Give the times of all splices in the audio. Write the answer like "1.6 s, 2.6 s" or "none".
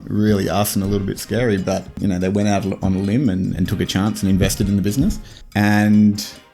1.9 s